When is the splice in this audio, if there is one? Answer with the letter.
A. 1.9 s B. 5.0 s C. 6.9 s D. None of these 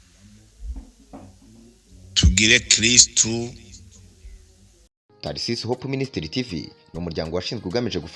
B